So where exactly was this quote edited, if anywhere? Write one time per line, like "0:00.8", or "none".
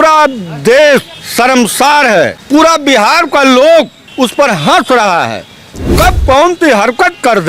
0:01.2
0:02.4
0:04.0